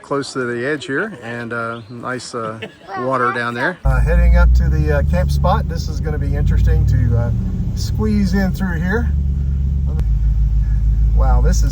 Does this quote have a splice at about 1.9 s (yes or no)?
no